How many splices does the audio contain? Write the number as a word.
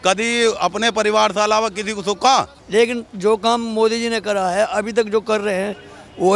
one